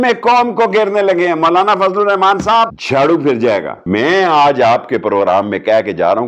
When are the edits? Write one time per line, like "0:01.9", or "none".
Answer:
0:02.8
0:03.8